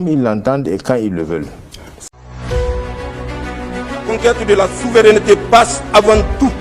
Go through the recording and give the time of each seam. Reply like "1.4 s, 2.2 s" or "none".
2.1 s